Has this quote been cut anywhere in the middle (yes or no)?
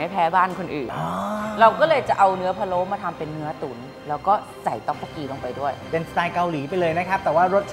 no